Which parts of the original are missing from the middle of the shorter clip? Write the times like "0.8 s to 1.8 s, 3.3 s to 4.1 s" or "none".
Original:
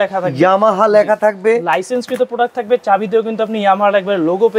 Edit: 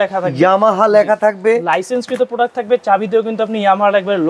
none